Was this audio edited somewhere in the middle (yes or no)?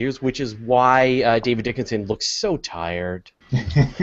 yes